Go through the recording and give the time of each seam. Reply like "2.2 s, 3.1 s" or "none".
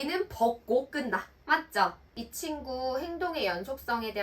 2.1 s